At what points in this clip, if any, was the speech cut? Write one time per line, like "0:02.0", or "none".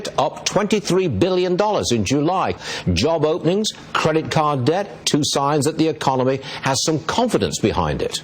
none